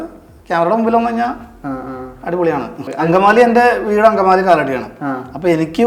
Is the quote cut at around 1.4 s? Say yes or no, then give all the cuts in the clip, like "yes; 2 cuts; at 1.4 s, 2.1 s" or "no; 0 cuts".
no; 1 cut; at 2.8 s